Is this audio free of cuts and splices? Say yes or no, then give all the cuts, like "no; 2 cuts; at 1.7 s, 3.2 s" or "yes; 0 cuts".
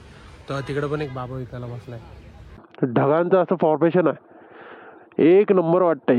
no; 1 cut; at 2.7 s